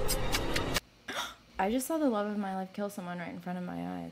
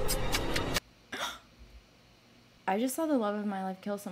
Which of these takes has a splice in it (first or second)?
first